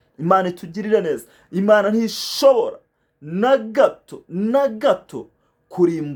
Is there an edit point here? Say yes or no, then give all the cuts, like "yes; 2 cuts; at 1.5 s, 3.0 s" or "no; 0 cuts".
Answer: no; 0 cuts